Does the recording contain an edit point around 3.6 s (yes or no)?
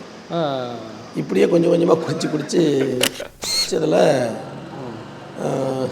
yes